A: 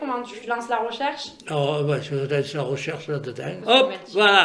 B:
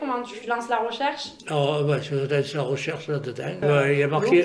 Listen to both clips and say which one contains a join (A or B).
A